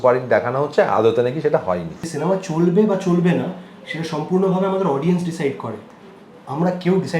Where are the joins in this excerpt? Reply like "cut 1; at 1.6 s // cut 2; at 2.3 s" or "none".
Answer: cut 1; at 2.0 s